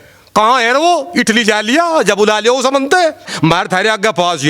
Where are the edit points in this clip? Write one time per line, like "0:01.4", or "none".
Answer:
0:03.3